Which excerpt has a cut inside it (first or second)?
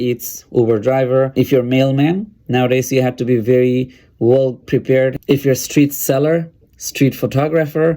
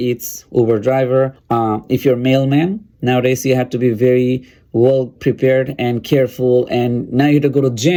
first